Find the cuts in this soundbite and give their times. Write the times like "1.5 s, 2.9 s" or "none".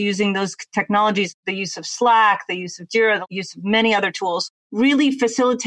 1.3 s, 3.2 s, 4.5 s